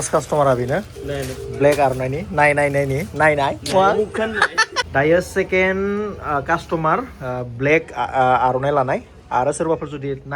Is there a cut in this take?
yes; 1 cut; at 4.8 s

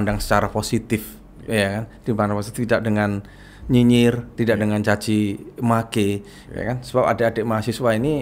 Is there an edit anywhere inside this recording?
no; 0 cuts

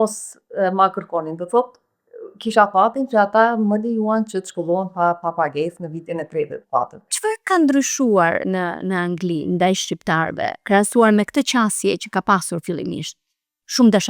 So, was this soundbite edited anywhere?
yes; 1 cut; at 7.0 s

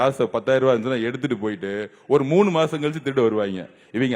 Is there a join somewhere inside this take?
no; 0 cuts

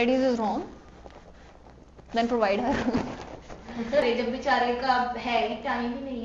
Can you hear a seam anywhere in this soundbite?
yes; 1 cut; at 4.1 s

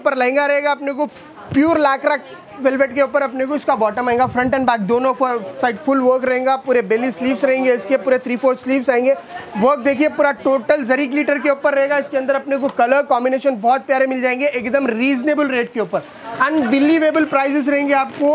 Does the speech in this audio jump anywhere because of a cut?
no; 0 cuts

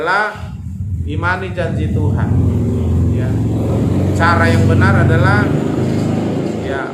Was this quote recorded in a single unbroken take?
yes; 0 cuts

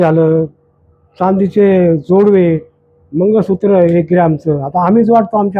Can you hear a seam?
no; 0 cuts

